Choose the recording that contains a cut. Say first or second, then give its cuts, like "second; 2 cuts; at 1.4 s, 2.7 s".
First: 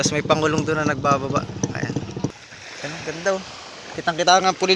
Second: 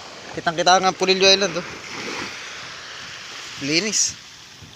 first; 1 cut; at 2.3 s